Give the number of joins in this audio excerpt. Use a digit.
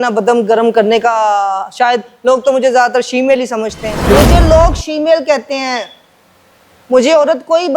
1